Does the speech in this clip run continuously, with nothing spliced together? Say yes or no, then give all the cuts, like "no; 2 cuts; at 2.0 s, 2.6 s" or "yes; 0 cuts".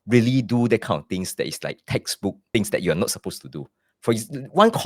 no; 1 cut; at 2.4 s